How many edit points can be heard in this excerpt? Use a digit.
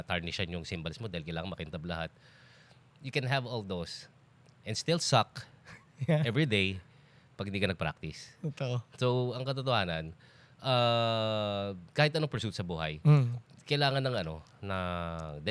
0